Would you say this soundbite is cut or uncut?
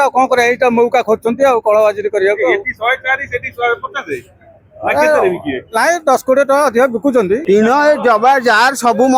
cut